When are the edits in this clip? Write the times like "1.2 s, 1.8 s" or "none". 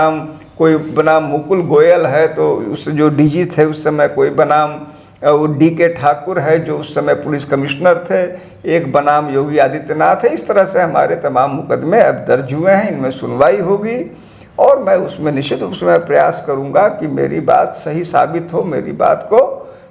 none

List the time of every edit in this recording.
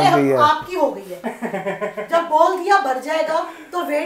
none

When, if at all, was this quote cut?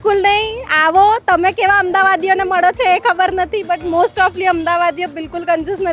none

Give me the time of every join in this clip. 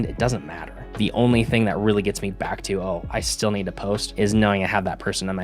0.9 s, 4.1 s

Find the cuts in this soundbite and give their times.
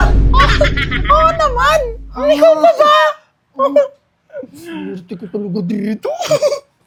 none

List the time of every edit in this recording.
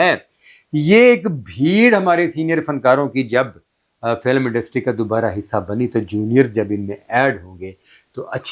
none

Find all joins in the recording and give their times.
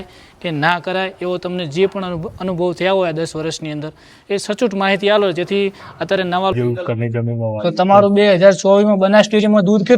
6.5 s

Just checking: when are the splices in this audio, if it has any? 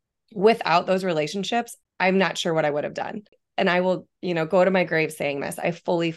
1.8 s, 3.4 s

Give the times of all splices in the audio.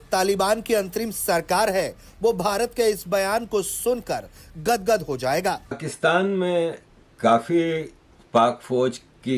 5.9 s

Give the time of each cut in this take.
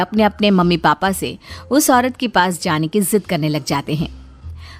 none

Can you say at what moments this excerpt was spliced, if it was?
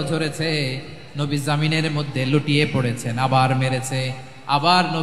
none

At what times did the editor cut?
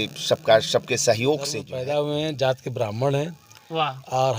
1.7 s

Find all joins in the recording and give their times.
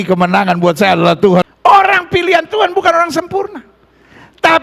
1.5 s

